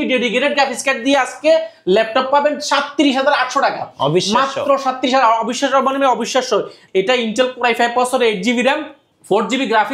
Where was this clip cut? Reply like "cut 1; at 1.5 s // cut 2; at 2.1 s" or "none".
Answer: cut 1; at 6.8 s